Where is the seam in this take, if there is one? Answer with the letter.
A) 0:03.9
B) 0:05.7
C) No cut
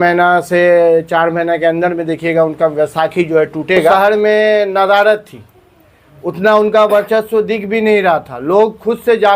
A